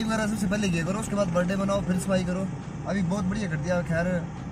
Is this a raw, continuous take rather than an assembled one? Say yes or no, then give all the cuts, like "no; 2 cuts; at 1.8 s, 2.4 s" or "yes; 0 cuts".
yes; 0 cuts